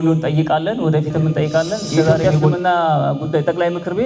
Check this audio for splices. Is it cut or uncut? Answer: cut